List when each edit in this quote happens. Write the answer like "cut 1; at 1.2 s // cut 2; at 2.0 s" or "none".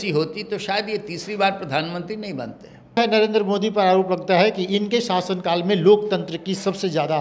cut 1; at 3.0 s